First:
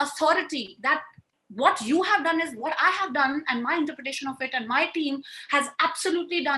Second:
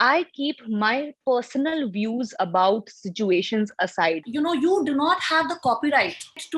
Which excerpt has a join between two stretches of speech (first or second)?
second